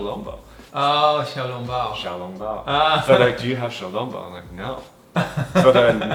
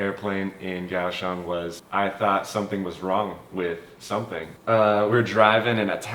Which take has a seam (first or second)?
second